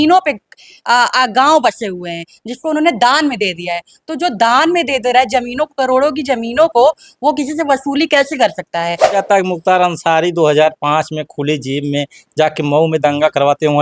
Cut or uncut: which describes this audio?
cut